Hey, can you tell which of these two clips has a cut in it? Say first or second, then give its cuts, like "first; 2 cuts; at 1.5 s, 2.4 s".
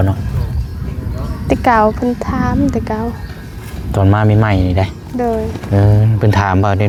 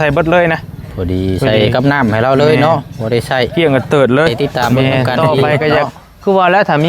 second; 1 cut; at 4.3 s